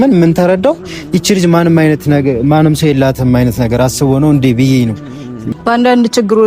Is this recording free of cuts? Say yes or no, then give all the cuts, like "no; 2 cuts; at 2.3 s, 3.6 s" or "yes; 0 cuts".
no; 1 cut; at 5.5 s